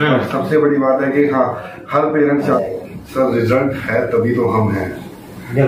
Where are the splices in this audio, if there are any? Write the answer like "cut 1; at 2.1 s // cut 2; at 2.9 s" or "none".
cut 1; at 2.6 s